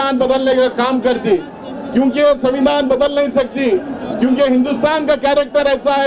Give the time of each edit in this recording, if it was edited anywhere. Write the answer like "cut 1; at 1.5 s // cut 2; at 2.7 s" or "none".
none